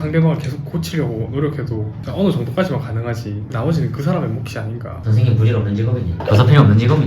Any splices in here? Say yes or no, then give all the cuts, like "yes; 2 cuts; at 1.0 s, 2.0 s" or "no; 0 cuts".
yes; 1 cut; at 5.0 s